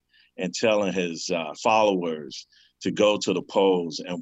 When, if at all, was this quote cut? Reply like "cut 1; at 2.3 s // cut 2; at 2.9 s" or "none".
cut 1; at 1.5 s